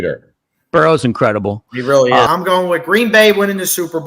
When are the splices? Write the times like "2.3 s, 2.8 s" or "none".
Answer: 2.3 s